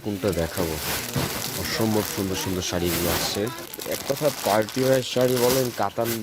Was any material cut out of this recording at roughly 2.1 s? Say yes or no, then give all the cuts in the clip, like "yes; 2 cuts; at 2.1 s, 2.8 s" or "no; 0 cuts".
no; 1 cut; at 3.7 s